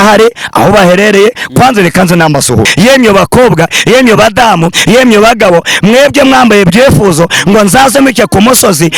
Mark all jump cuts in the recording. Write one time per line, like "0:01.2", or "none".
0:02.7